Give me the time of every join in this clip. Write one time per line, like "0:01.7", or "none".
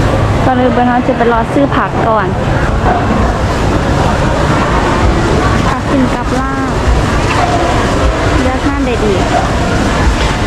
none